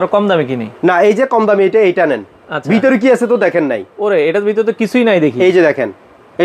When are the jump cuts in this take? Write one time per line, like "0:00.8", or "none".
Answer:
none